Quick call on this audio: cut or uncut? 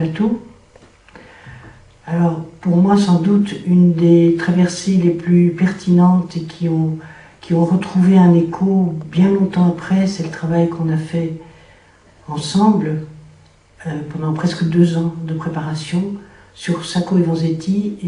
uncut